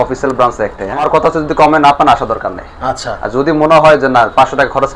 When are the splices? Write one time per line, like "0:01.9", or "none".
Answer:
0:01.0